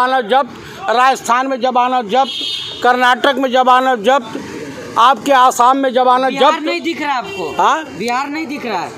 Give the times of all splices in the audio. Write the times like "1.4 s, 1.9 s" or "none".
none